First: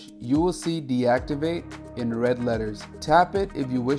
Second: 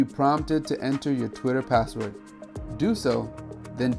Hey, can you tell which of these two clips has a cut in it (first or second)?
first